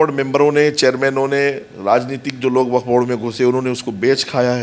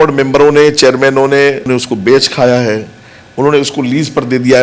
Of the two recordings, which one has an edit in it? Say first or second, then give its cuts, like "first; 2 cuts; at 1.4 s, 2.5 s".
second; 1 cut; at 1.7 s